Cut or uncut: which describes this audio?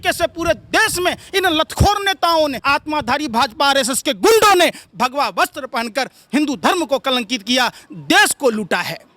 uncut